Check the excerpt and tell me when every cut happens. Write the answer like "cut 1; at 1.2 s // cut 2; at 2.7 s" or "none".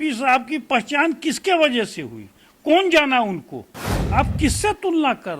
cut 1; at 4.0 s